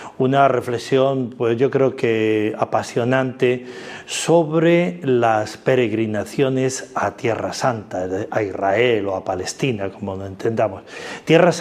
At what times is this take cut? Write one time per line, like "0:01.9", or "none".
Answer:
none